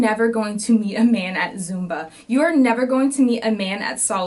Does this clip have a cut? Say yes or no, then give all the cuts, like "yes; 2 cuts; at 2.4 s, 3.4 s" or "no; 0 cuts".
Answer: no; 0 cuts